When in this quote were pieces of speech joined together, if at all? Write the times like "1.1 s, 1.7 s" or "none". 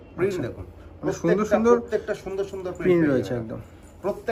none